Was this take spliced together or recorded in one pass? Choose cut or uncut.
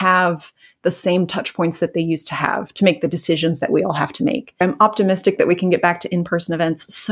cut